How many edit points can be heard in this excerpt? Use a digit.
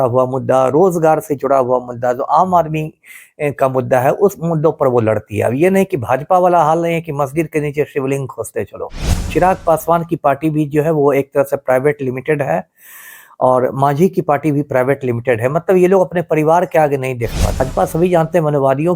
2